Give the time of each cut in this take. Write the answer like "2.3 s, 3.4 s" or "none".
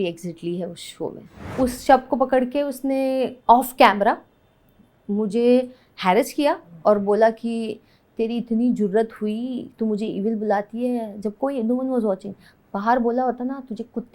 1.5 s